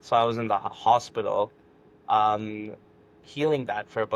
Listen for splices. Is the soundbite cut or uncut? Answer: uncut